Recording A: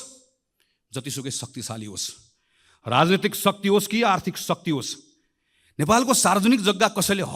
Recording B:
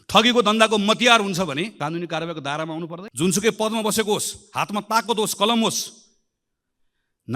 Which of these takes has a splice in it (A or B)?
B